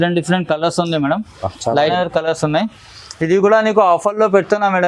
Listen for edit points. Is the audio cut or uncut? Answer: cut